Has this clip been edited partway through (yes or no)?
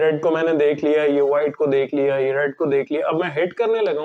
no